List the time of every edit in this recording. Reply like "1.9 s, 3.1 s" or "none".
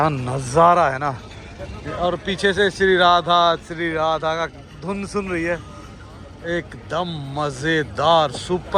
none